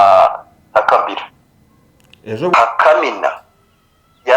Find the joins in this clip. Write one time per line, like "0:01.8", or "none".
0:02.5